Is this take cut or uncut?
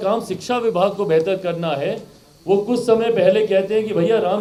uncut